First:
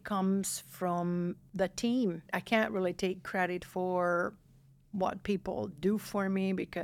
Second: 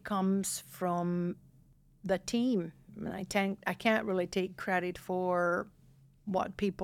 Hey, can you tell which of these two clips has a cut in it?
first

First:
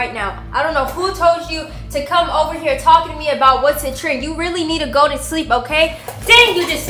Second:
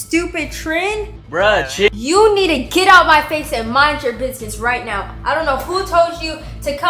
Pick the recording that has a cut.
second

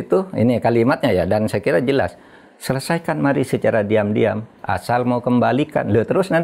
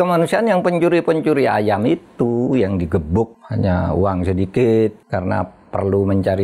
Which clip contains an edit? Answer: second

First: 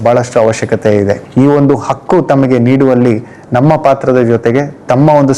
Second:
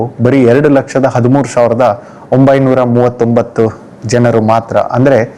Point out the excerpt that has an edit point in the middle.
first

